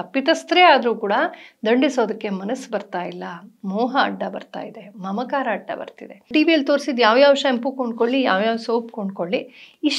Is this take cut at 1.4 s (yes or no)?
no